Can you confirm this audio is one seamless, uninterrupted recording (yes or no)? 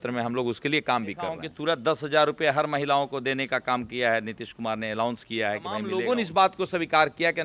no